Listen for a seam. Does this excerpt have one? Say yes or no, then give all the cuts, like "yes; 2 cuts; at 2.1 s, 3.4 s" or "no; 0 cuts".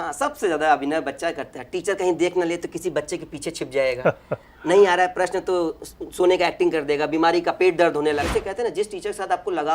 yes; 1 cut; at 8.2 s